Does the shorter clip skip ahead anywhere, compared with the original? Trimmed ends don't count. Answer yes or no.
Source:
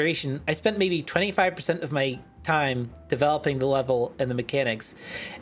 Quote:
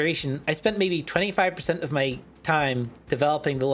no